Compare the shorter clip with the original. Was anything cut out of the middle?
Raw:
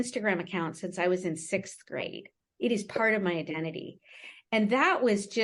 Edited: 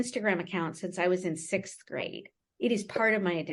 no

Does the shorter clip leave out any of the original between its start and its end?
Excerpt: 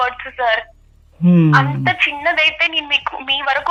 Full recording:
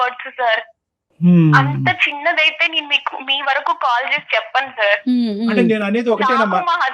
no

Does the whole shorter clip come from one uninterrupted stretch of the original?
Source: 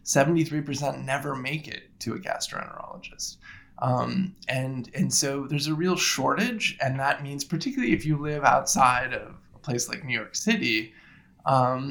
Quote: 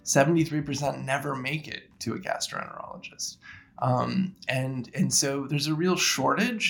yes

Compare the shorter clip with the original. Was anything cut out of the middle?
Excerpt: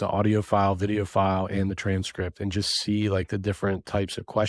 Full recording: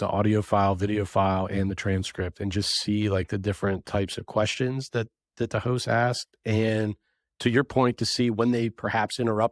no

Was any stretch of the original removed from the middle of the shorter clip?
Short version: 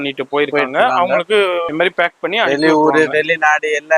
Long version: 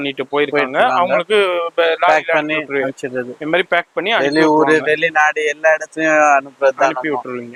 yes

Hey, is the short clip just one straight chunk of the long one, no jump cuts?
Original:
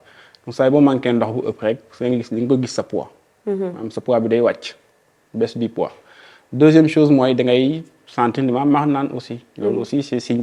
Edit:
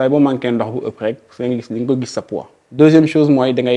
no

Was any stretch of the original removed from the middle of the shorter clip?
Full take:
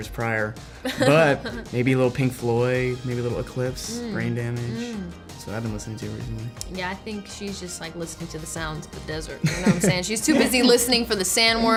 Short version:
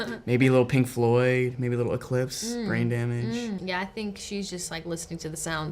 yes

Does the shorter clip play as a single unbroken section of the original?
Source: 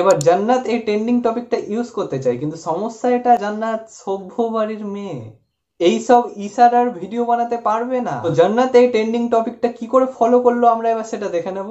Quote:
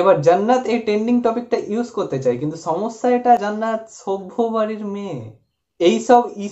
yes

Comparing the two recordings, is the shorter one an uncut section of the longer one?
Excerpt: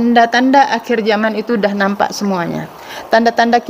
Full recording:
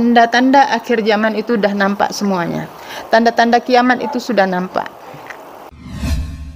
yes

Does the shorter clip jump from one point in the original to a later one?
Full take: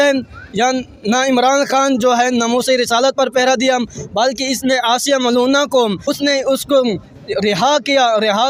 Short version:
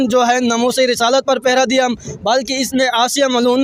no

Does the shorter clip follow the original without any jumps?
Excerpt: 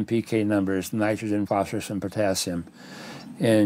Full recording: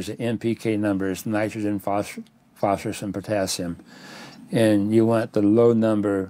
no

